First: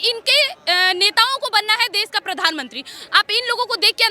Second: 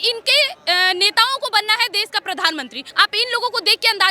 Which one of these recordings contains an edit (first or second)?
second